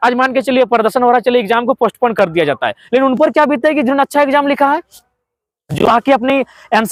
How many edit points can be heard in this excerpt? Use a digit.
0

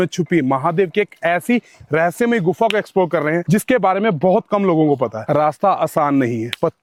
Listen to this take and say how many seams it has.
0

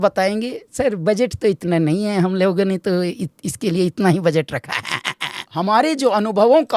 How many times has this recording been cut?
1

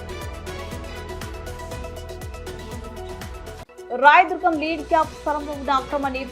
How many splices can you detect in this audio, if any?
1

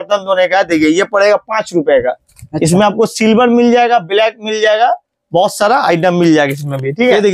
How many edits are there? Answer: 0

